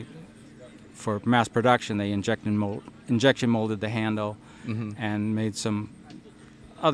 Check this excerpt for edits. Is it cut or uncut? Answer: uncut